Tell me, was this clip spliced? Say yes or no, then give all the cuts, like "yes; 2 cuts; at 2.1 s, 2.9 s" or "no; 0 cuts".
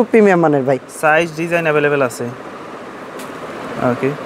no; 0 cuts